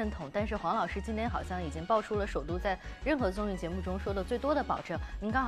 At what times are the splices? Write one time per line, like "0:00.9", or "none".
none